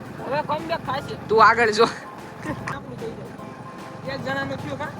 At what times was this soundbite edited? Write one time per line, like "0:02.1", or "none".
0:02.6